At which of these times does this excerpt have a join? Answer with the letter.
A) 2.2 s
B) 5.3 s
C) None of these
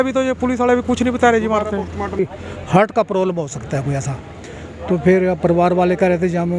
A